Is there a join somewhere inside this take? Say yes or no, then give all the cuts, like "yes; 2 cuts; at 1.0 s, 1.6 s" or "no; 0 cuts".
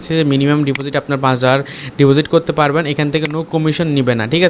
no; 0 cuts